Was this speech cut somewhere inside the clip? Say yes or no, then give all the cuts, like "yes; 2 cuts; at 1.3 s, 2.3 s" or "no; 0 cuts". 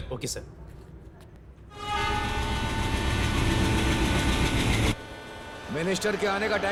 no; 0 cuts